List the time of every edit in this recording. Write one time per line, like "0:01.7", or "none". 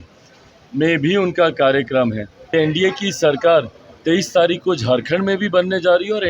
0:02.3